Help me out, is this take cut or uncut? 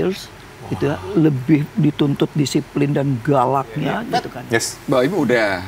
cut